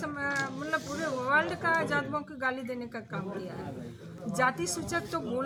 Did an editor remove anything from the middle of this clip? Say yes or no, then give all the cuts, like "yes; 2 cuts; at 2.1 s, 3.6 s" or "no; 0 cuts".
no; 0 cuts